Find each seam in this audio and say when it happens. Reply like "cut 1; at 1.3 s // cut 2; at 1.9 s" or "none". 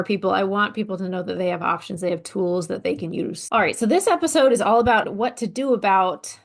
cut 1; at 3.4 s // cut 2; at 5.0 s